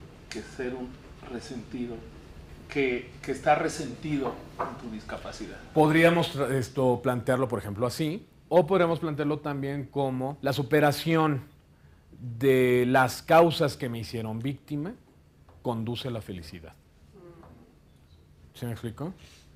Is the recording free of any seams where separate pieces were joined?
yes; 0 cuts

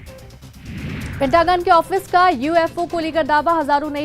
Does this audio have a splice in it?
yes; 1 cut; at 1.1 s

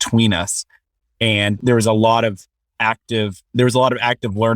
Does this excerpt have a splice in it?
yes; 1 cut; at 3.4 s

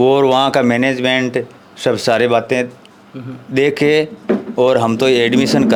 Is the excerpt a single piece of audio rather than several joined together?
yes; 0 cuts

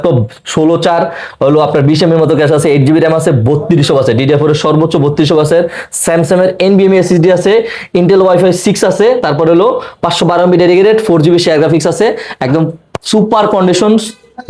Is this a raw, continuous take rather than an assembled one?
yes; 0 cuts

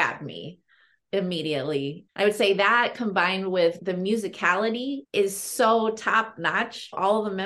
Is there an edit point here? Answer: yes; 2 cuts; at 0.9 s, 3.8 s

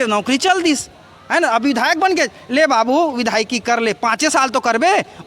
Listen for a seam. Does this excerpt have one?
no; 0 cuts

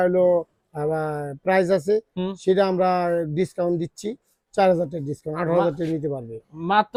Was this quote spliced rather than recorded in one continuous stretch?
no; 0 cuts

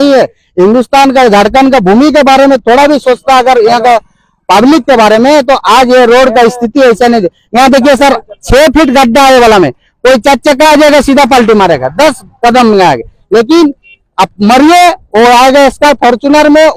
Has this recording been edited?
no; 0 cuts

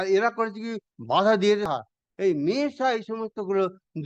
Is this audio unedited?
no; 1 cut; at 1.7 s

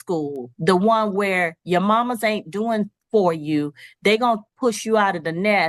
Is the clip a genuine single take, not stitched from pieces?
yes; 0 cuts

